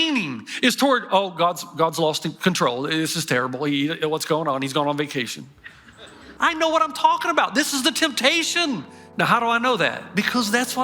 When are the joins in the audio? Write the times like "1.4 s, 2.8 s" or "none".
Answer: 6.2 s, 9.0 s